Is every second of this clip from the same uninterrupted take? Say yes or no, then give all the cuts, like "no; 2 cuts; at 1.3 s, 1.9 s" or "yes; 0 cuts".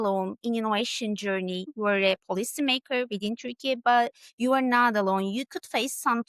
no; 1 cut; at 1.7 s